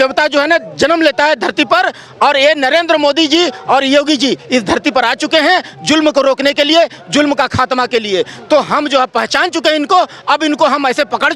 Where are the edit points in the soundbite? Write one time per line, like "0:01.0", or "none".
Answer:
none